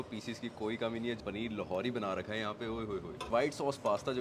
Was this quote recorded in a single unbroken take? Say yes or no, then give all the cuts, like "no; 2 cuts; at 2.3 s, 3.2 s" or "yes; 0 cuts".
no; 2 cuts; at 1.2 s, 3.3 s